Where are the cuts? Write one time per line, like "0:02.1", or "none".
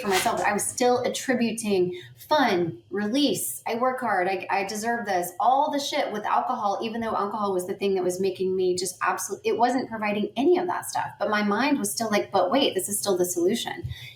none